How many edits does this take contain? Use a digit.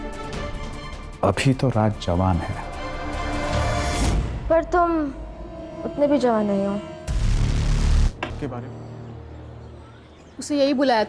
1